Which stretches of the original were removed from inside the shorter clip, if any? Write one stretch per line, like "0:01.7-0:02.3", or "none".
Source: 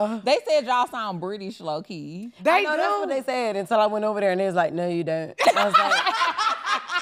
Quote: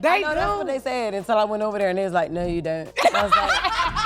none